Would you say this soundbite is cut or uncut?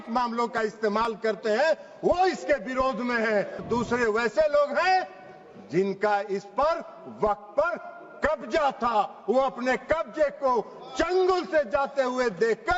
cut